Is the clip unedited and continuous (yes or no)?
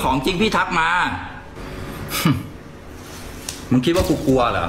yes